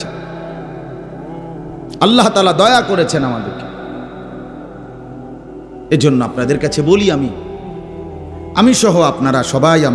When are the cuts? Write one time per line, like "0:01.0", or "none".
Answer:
none